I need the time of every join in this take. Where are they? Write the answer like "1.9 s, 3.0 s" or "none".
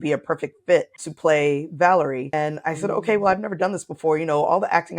1.0 s, 2.2 s